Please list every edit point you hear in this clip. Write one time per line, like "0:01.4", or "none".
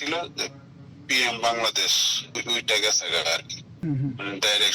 0:02.4
0:03.8